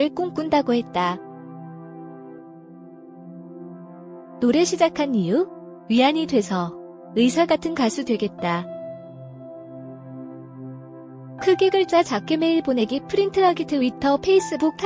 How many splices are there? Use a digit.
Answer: 4